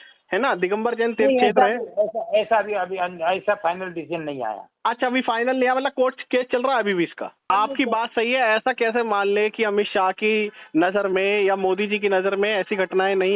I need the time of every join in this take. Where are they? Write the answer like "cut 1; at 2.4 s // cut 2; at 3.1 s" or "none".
cut 1; at 7.5 s